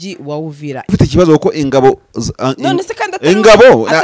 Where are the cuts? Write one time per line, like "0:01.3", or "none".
0:00.9

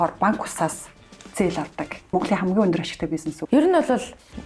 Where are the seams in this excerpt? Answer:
0:02.1
0:03.4

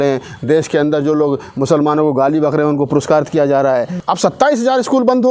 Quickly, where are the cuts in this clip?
0:04.0

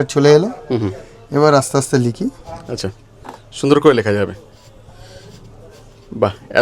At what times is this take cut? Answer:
none

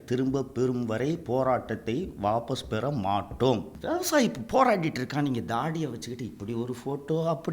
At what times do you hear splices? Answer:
0:03.7

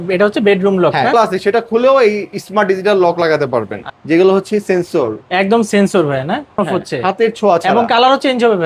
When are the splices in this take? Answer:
none

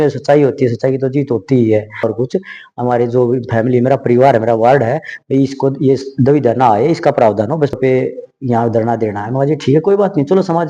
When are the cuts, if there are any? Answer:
0:02.0
0:07.7

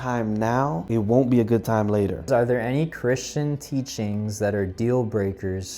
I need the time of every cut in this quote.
0:00.8
0:02.3

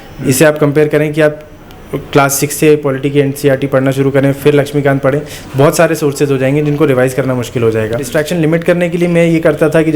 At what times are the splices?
0:08.1

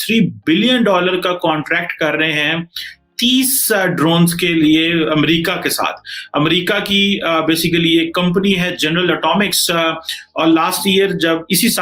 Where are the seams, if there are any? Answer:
none

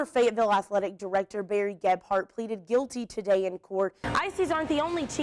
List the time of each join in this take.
0:04.0

